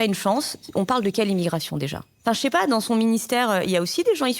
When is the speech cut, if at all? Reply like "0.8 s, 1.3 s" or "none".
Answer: 2.1 s

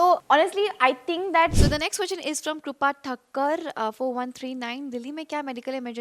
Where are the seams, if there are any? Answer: 1.5 s

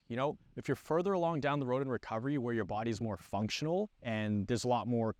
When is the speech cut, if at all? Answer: none

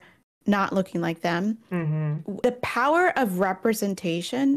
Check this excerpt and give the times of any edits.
2.4 s

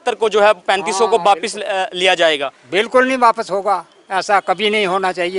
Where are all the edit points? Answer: none

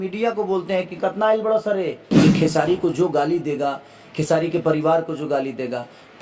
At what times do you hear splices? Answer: 2.0 s

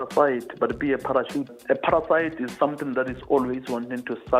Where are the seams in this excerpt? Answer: 1.5 s

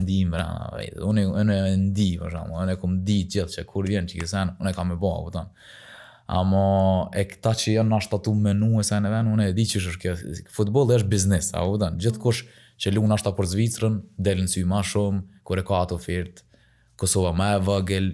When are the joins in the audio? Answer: none

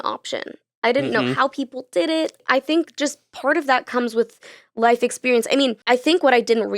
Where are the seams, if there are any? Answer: 2.4 s, 5.8 s

